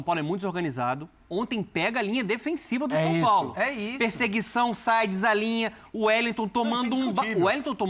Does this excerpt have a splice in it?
no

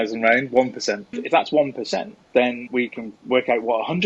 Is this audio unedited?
no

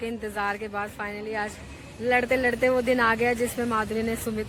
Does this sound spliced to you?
no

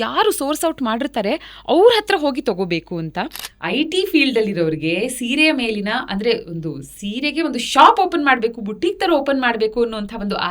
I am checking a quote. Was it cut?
yes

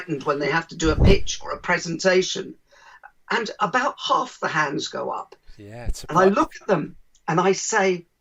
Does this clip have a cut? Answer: no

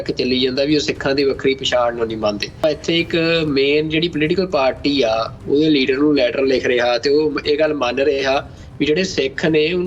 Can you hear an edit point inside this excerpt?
yes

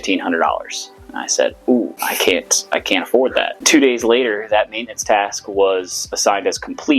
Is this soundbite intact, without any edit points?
no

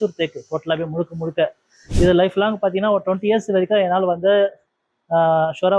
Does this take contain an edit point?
no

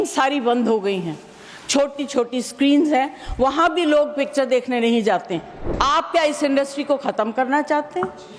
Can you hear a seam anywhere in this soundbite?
yes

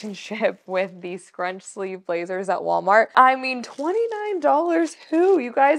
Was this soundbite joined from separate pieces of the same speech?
yes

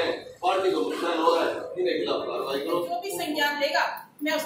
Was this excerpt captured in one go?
no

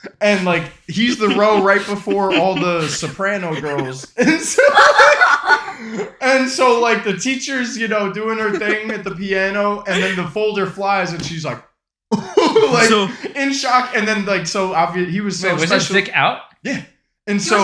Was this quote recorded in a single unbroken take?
yes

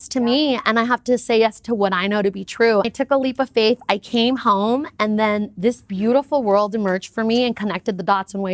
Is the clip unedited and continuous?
no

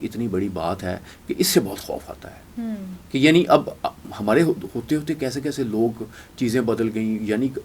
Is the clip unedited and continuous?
yes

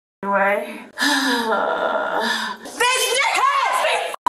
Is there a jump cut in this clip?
yes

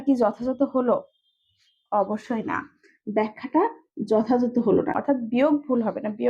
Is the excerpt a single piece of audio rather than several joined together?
no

